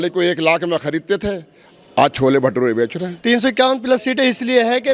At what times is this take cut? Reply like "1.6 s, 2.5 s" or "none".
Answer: 3.1 s